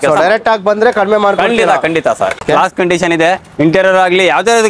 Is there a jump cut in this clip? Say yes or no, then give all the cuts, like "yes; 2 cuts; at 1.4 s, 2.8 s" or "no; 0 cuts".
yes; 1 cut; at 2.4 s